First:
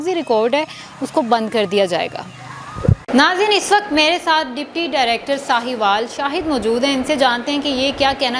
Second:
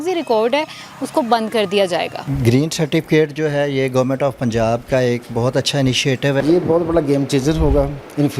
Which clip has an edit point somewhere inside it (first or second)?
second